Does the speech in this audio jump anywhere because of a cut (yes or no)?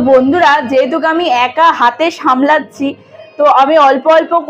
no